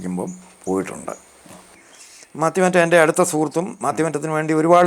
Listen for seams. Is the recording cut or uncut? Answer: cut